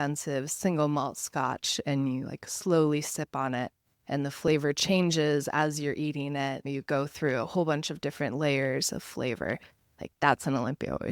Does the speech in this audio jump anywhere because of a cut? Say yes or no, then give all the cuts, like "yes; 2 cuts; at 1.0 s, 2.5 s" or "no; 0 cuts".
no; 0 cuts